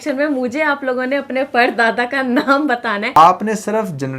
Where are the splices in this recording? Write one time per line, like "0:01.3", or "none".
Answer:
0:03.2